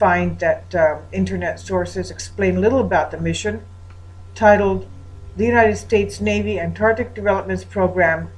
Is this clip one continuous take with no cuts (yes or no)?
no